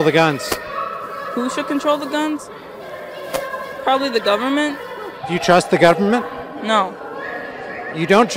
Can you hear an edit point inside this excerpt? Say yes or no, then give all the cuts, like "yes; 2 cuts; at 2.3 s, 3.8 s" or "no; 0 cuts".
no; 0 cuts